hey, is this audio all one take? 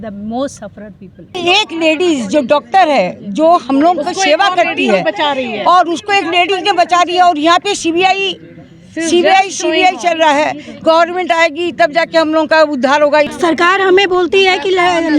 no; 2 cuts; at 1.4 s, 13.3 s

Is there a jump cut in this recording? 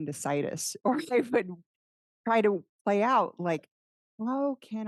no; 0 cuts

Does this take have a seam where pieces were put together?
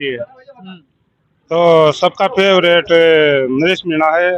no; 0 cuts

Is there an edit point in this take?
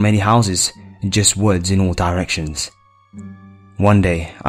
no; 0 cuts

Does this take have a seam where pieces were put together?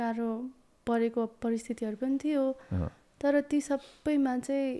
no; 0 cuts

